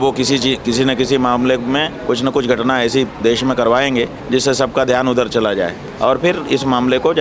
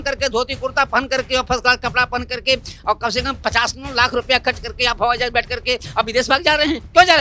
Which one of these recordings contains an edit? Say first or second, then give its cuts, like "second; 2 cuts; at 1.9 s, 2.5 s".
first; 2 cuts; at 4.2 s, 5.8 s